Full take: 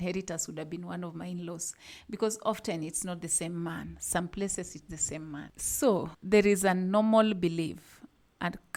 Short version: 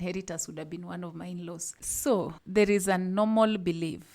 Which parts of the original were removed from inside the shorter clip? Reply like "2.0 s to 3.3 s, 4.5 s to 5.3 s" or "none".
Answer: 1.8 s to 5.6 s